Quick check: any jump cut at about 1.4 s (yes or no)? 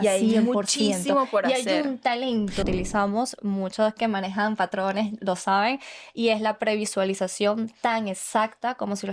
no